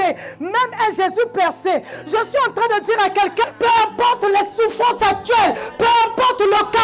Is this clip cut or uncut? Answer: cut